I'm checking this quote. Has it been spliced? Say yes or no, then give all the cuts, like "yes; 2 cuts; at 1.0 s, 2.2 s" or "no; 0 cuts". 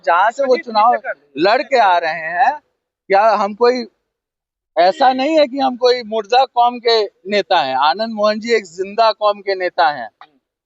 no; 0 cuts